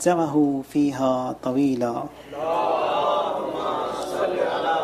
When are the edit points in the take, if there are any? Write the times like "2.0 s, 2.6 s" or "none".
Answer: none